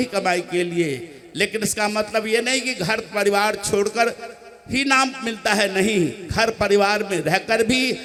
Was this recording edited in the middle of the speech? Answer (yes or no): no